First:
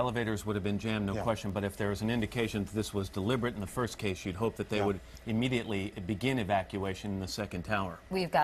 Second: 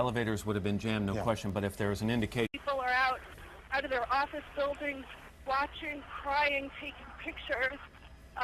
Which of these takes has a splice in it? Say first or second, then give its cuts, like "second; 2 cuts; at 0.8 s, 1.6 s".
first; 1 cut; at 2.5 s